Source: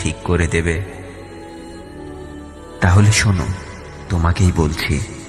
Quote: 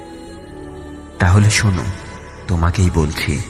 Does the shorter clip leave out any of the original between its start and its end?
yes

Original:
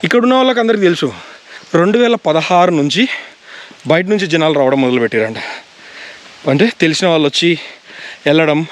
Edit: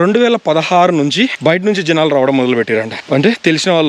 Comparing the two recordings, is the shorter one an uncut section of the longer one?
no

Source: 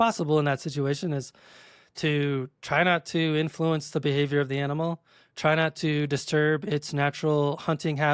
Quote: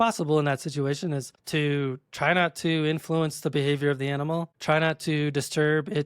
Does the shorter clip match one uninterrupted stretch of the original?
no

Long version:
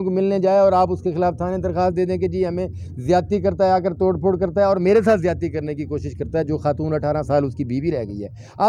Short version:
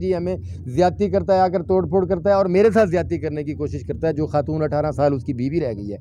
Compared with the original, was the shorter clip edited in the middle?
no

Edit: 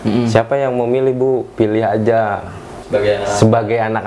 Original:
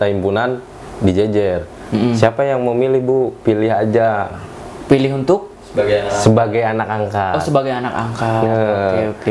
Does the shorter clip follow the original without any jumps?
no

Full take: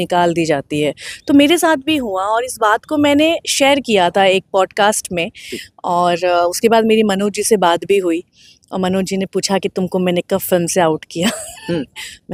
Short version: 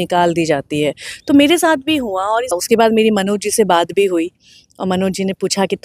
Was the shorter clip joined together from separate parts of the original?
yes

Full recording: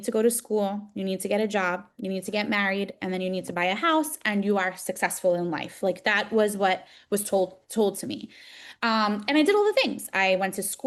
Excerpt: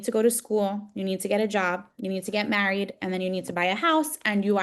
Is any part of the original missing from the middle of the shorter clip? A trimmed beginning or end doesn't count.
no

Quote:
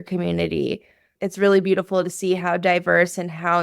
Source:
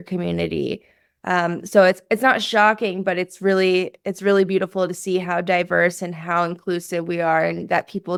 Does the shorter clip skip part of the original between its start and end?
yes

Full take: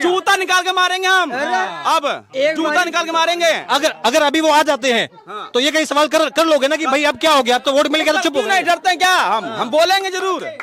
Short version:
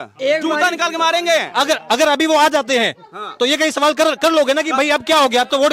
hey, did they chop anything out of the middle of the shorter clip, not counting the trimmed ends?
no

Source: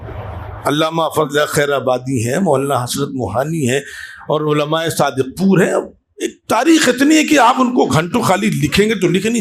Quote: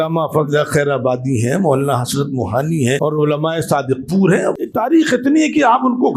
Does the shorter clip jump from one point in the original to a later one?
yes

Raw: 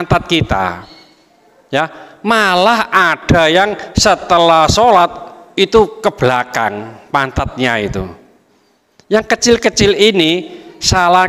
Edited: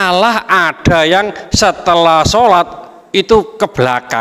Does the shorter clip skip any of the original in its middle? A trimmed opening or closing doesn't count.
no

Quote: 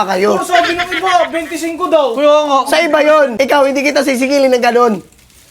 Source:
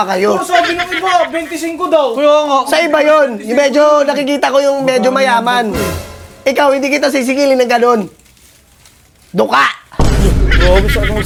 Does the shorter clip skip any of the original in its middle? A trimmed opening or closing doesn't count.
yes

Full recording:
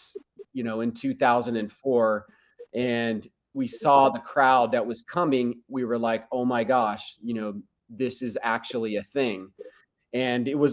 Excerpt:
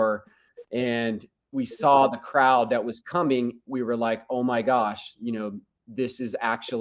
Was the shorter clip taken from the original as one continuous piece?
yes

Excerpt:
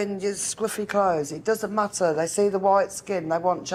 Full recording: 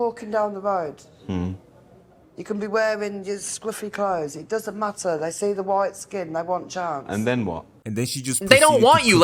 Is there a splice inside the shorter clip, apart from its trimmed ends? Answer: no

